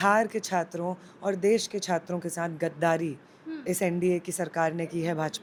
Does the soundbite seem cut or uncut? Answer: uncut